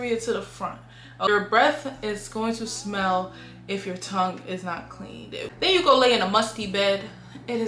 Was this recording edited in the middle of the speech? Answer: yes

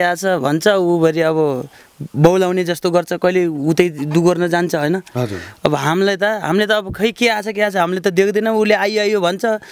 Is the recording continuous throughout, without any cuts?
yes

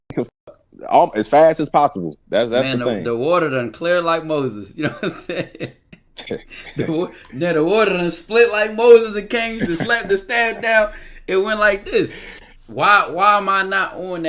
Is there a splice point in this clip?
no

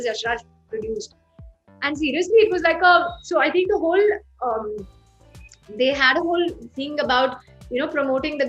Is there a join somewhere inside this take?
no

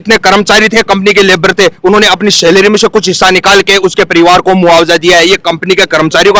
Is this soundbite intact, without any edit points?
yes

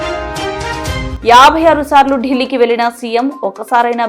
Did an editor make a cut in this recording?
yes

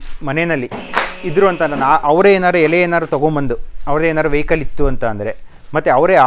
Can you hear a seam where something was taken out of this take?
no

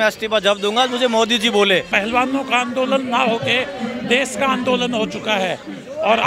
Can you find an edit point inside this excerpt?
yes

